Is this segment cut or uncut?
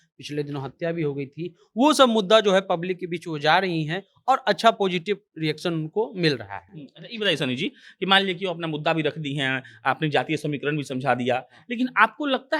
uncut